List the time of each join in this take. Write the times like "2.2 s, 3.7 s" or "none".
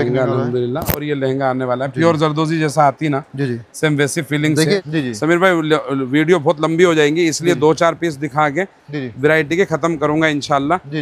4.8 s